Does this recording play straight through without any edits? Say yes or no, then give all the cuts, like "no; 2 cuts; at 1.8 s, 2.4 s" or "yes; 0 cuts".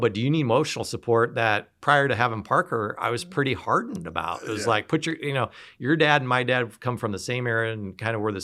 yes; 0 cuts